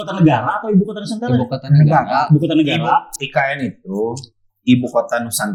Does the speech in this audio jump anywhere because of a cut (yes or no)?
no